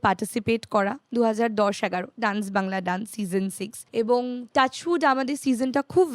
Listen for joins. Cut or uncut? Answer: cut